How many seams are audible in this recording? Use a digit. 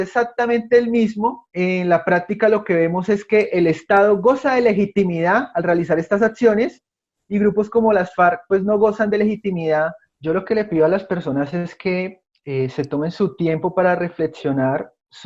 1